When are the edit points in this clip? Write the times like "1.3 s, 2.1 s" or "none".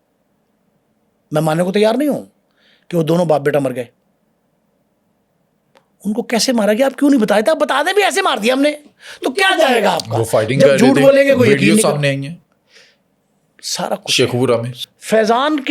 14.8 s